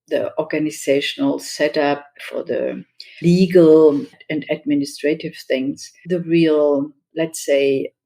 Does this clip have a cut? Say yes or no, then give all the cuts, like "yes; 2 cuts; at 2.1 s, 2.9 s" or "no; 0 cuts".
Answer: yes; 2 cuts; at 5.9 s, 7.0 s